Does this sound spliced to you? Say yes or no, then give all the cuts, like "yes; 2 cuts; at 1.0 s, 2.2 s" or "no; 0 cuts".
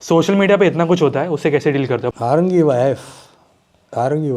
yes; 1 cut; at 2.1 s